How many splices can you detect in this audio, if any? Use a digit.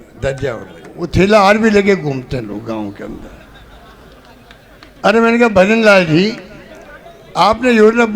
1